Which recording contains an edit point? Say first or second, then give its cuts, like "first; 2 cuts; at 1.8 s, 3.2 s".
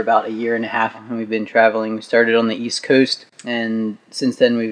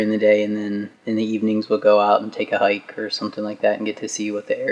first; 2 cuts; at 1.1 s, 3.3 s